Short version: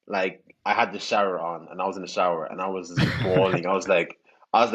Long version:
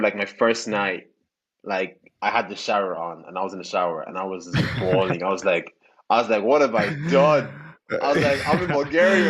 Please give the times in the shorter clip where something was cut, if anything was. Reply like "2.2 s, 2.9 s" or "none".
none